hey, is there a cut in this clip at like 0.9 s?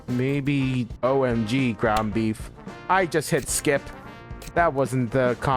yes; 1 cut; at 0.9 s

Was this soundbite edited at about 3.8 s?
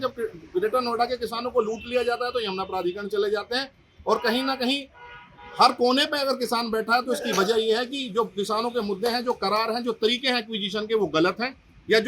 no; 0 cuts

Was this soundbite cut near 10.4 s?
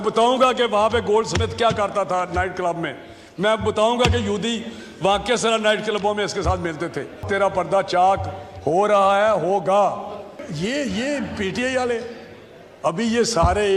yes; 2 cuts; at 7.2 s, 10.4 s

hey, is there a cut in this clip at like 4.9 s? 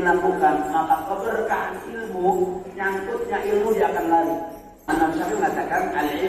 yes; 1 cut; at 4.9 s

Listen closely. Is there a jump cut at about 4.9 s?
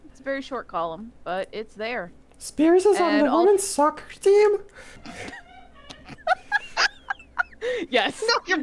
yes; 1 cut; at 4.9 s

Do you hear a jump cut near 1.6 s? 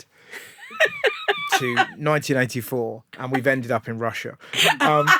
no; 0 cuts

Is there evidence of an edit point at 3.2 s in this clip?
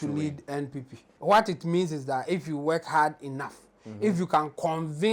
no; 1 cut; at 1.0 s

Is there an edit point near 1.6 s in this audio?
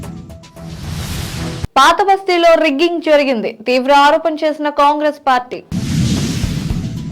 yes; 1 cut; at 1.6 s

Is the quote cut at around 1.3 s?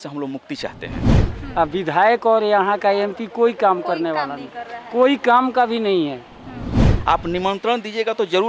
yes; 2 cuts; at 1.3 s, 6.9 s

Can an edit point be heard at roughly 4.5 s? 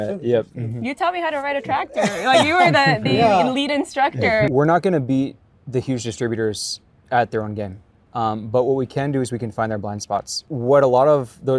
yes; 2 cuts; at 4.5 s, 10.4 s

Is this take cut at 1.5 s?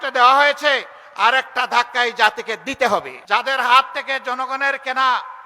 no; 1 cut; at 3.1 s

